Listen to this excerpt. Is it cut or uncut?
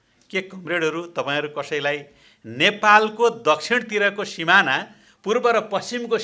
uncut